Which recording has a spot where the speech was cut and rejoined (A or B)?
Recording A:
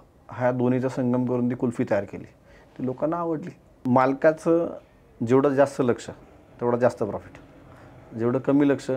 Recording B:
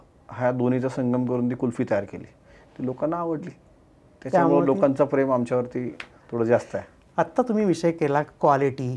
A